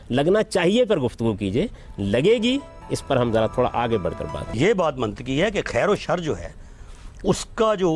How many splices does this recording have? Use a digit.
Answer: 1